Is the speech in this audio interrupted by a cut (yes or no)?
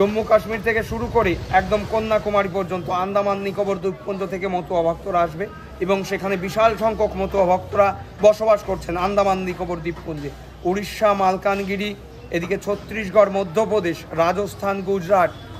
no